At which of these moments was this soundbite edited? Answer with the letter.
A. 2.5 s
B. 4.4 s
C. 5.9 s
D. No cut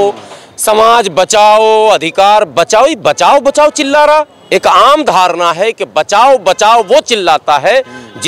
B